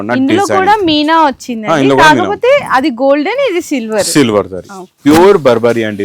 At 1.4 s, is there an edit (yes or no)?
no